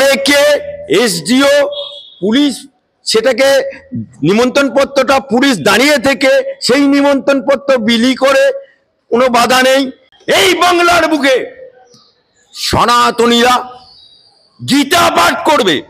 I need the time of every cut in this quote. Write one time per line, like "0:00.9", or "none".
0:10.1